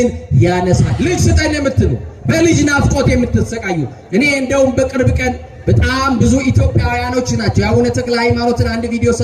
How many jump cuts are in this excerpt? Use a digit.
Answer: 1